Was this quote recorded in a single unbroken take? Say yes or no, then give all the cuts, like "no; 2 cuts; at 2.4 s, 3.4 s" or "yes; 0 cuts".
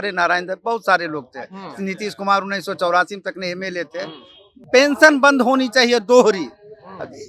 no; 1 cut; at 4.6 s